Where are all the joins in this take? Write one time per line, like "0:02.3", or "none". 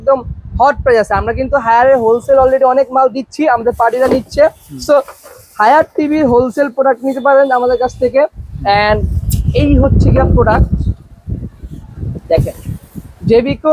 none